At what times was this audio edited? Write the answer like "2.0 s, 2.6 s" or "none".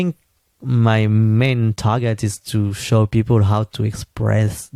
none